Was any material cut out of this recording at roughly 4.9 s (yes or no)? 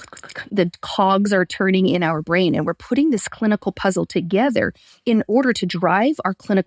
yes